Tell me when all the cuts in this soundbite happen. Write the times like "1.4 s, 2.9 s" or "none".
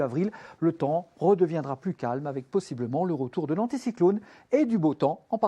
1.6 s

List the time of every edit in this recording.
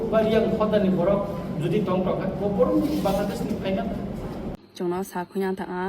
4.6 s

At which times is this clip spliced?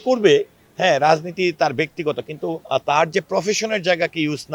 2.6 s

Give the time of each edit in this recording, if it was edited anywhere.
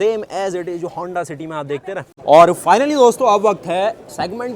2.1 s

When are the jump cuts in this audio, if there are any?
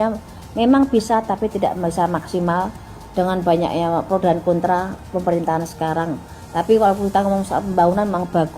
none

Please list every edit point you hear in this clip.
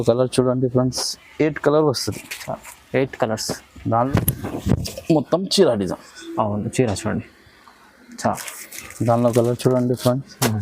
3.9 s

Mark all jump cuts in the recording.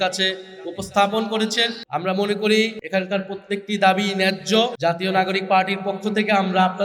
1.8 s, 2.8 s, 4.7 s

